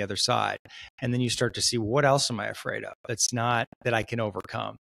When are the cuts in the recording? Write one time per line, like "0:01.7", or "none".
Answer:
none